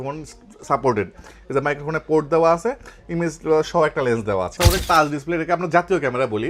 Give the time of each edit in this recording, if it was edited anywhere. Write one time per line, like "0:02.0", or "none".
0:04.6